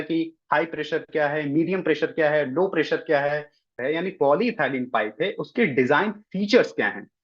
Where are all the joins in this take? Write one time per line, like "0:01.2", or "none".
0:03.7